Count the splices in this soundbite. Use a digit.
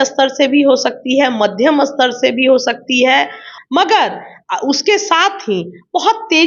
1